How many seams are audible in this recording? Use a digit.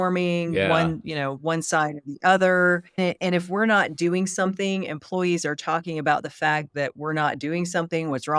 1